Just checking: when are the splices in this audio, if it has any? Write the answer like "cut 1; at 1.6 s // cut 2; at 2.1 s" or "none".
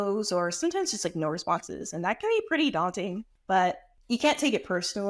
cut 1; at 3.3 s // cut 2; at 3.9 s